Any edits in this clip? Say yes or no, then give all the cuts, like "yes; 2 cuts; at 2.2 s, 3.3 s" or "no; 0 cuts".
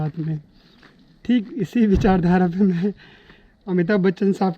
no; 0 cuts